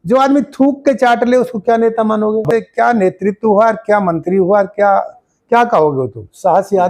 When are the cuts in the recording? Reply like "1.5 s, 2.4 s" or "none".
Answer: 2.5 s